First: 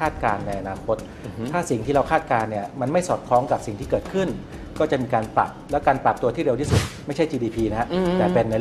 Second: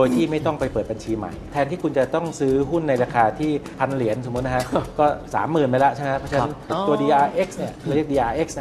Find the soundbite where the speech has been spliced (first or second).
second